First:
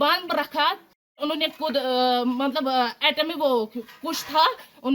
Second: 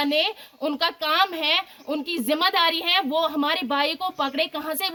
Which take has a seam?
first; 1 cut; at 1.1 s

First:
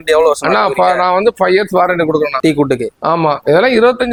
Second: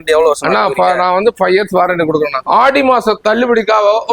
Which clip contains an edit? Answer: second; 1 cut; at 2.4 s

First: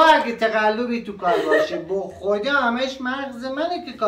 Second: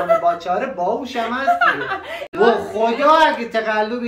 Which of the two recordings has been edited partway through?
second; 1 cut; at 2.2 s

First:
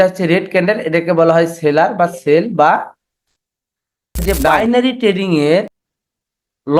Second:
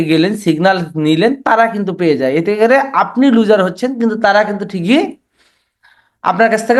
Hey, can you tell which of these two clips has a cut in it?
first; 2 cuts; at 4.2 s, 5.8 s

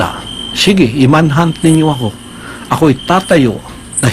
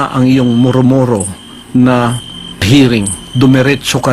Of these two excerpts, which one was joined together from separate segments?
second; 1 cut; at 2.6 s

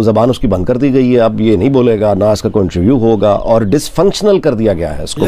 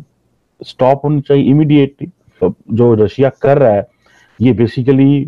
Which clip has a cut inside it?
second; 1 cut; at 2.4 s

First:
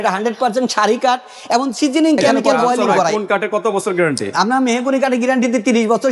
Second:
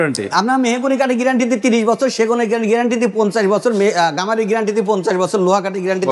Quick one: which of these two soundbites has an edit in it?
first; 1 cut; at 3.1 s

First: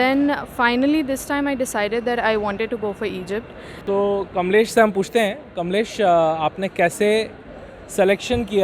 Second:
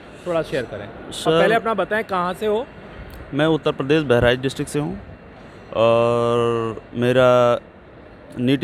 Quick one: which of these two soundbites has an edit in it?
first; 1 cut; at 3.8 s

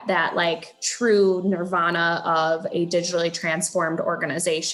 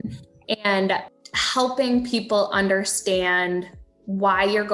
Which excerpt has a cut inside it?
second; 1 cut; at 1.1 s

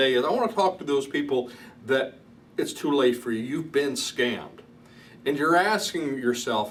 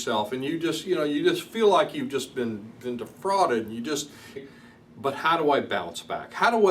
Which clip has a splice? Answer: second; 1 cut; at 4.4 s

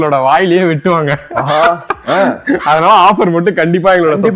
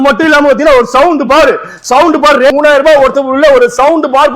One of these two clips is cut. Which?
second; 1 cut; at 2.5 s

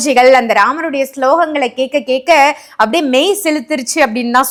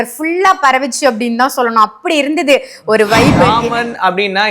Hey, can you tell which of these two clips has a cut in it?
second; 1 cut; at 3.5 s

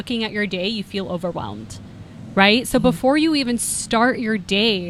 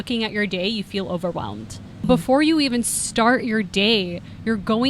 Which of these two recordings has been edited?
second; 1 cut; at 2.1 s

